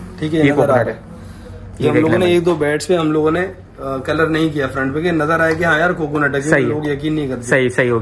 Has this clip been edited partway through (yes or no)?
no